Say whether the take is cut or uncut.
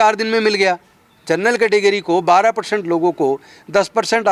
uncut